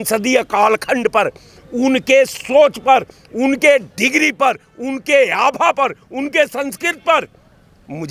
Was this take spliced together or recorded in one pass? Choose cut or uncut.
uncut